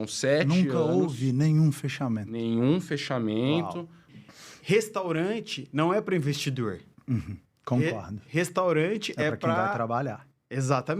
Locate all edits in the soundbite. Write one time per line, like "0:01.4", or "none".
0:04.1